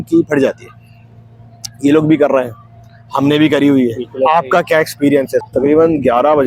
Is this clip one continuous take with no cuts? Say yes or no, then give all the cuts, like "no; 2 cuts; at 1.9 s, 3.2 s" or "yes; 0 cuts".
no; 1 cut; at 5.4 s